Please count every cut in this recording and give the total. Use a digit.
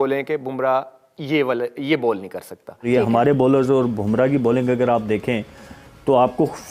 1